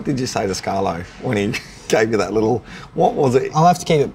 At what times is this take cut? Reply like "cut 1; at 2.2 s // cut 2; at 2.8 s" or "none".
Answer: none

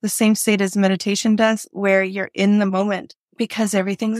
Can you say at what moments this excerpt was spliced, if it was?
cut 1; at 3.2 s

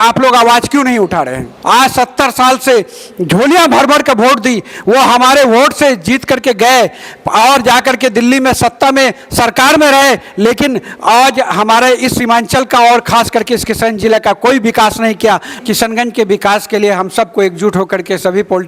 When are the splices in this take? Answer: cut 1; at 1.5 s // cut 2; at 15.6 s

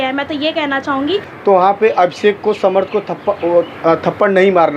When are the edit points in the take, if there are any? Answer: cut 1; at 1.3 s

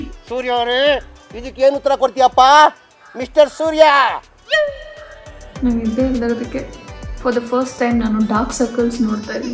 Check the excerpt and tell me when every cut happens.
cut 1; at 5.3 s

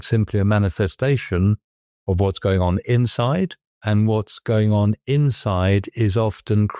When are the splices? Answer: cut 1; at 3.7 s

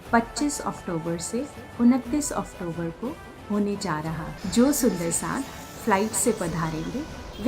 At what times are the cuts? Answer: cut 1; at 4.3 s

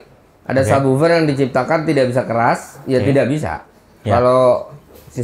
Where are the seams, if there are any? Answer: none

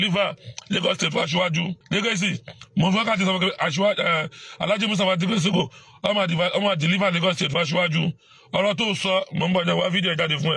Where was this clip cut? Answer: cut 1; at 1.8 s

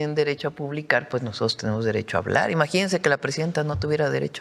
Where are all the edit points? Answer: none

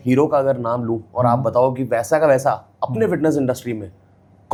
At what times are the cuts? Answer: none

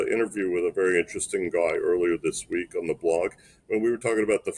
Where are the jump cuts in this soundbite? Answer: none

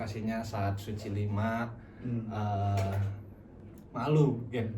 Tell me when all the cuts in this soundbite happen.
cut 1; at 3.5 s

